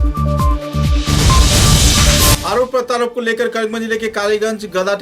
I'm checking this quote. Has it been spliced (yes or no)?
yes